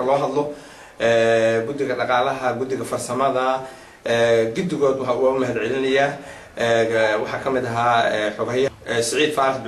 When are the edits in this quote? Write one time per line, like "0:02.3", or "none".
0:08.7